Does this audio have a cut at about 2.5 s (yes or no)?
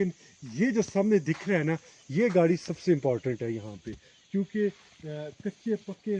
no